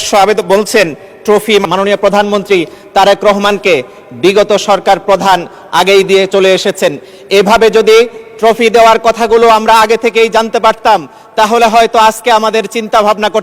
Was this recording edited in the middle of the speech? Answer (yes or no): yes